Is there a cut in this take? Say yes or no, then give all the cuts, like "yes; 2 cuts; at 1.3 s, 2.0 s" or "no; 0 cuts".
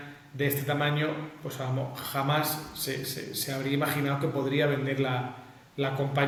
no; 0 cuts